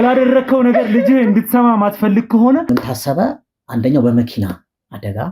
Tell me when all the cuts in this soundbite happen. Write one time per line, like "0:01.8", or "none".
0:02.6